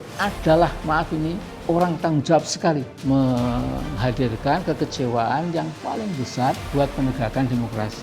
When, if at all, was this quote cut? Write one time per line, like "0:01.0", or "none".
0:01.5
0:02.9
0:06.6